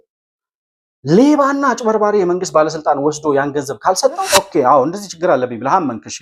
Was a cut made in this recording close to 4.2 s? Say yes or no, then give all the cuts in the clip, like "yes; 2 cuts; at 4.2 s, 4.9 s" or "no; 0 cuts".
yes; 1 cut; at 4.2 s